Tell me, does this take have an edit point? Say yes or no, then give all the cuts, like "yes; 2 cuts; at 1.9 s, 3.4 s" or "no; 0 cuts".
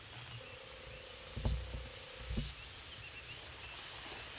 no; 0 cuts